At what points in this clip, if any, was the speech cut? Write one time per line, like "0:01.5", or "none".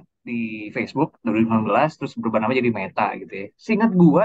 none

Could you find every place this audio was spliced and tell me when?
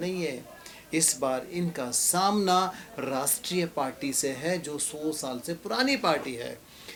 none

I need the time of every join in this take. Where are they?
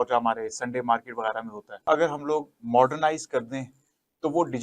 0:01.8

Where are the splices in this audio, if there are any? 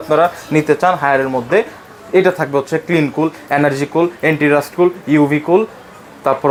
none

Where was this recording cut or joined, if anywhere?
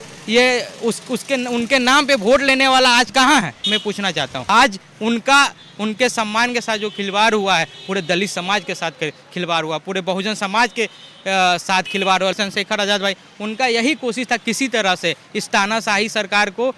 0:04.5
0:12.4

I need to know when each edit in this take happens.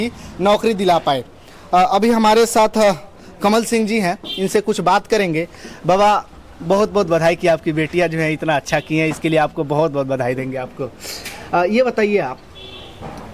none

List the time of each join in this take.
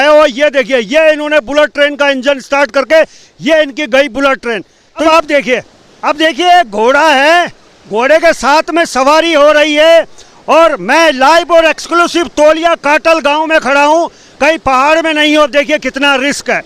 0:04.9

